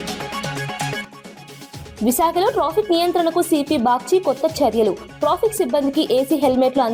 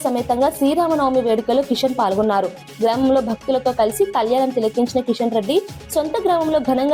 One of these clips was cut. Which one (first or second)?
first